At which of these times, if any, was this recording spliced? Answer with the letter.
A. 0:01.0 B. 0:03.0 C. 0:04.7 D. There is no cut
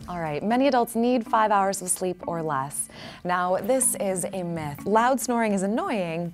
C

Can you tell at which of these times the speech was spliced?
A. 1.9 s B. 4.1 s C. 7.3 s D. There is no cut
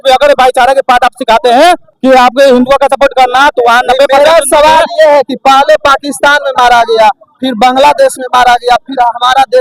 D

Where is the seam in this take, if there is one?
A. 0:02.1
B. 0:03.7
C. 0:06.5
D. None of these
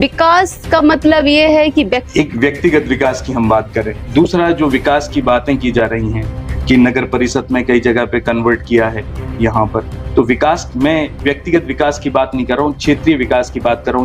A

